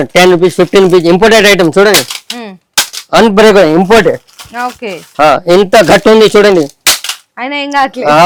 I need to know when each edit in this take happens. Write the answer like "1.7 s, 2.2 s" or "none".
none